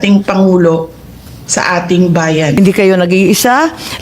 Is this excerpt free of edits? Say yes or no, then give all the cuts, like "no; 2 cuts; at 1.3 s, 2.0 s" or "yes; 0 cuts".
no; 1 cut; at 2.6 s